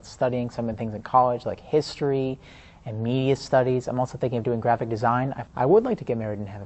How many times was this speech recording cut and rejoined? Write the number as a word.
one